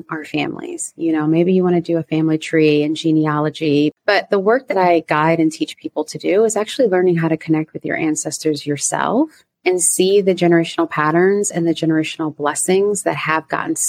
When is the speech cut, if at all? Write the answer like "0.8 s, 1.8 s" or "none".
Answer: 3.9 s